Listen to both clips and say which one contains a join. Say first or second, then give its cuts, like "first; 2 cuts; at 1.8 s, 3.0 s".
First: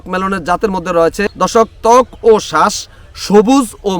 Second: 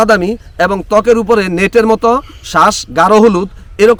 first; 1 cut; at 1.2 s